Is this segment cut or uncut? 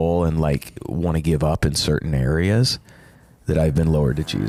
uncut